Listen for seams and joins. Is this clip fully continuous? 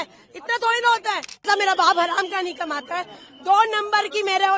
no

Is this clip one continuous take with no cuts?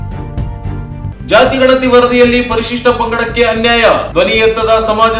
yes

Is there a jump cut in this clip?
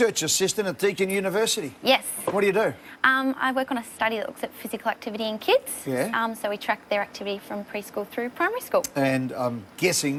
no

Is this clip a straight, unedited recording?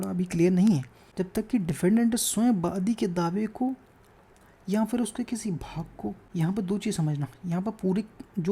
no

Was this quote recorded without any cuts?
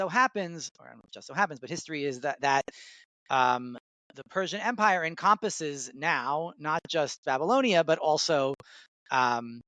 yes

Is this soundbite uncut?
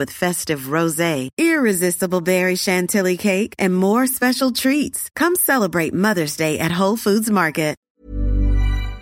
no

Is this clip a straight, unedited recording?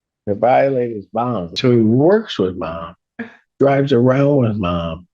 no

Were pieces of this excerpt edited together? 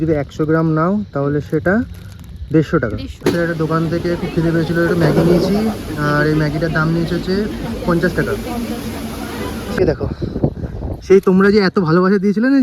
yes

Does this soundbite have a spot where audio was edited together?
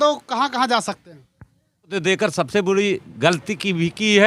yes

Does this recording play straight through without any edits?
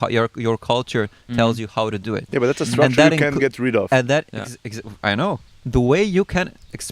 no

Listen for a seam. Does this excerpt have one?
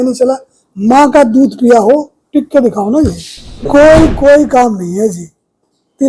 yes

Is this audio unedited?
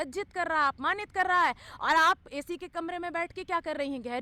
yes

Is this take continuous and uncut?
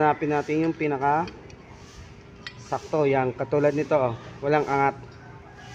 yes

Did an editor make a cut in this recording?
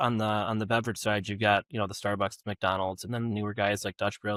no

